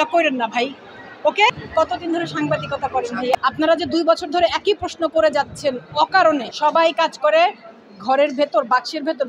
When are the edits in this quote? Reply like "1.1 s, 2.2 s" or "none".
3.4 s, 6.5 s